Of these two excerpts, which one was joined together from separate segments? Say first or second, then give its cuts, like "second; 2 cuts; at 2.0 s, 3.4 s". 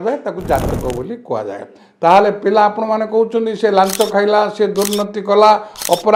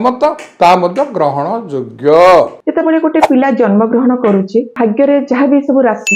second; 2 cuts; at 2.6 s, 4.7 s